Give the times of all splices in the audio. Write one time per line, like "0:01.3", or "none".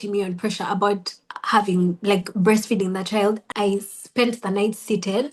0:03.4